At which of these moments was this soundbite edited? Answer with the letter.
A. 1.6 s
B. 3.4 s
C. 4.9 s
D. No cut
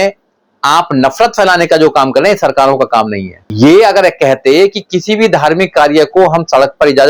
B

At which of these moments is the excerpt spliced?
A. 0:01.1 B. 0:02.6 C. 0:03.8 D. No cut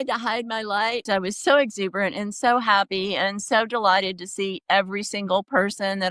A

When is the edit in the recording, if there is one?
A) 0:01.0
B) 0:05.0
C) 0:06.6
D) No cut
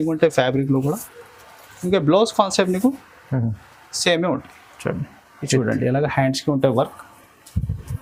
D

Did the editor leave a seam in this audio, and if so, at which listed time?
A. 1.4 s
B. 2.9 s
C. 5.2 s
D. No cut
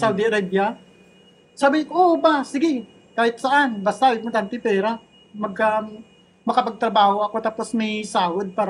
D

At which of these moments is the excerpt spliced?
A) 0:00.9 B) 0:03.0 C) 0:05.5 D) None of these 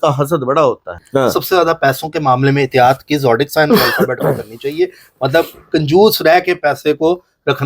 A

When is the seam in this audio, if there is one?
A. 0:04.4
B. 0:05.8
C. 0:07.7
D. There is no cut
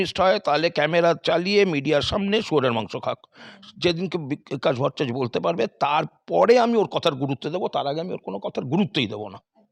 D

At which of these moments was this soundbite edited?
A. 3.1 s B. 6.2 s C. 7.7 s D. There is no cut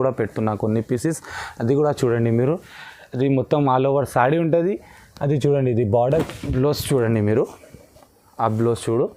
B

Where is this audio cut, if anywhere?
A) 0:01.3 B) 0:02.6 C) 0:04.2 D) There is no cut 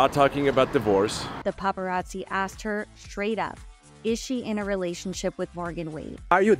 A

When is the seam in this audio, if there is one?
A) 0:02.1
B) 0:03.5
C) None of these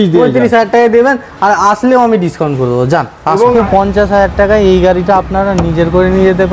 B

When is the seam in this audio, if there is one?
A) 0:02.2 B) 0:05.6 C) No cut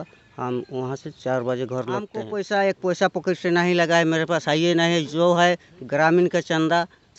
A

